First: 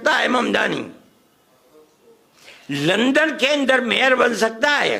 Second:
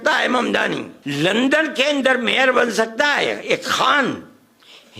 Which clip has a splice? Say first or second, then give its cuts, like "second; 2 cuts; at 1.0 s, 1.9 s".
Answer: second; 1 cut; at 0.9 s